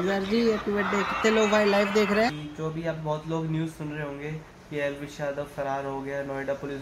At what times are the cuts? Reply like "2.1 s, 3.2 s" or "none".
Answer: 2.3 s